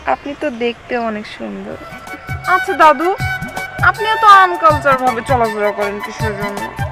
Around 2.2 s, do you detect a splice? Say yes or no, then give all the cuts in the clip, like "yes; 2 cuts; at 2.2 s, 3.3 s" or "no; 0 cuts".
yes; 1 cut; at 2.2 s